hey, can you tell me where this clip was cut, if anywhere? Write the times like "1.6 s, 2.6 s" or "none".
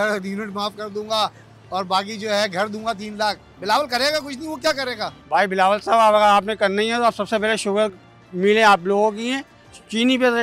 3.5 s, 5.2 s